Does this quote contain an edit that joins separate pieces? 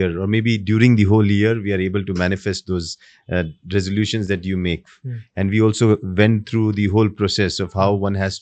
no; 0 cuts

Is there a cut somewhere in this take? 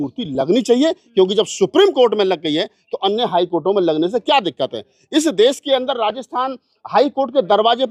no; 0 cuts

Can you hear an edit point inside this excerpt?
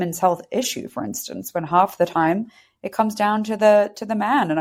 no; 0 cuts

